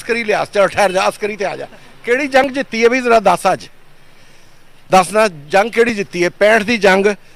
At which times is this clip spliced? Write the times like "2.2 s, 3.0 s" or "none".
none